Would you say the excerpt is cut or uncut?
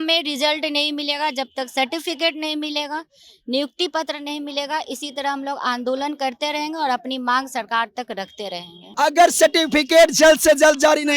cut